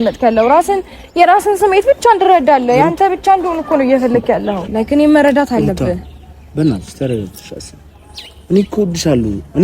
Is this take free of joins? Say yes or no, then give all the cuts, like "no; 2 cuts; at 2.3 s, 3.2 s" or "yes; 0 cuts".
no; 1 cut; at 4.6 s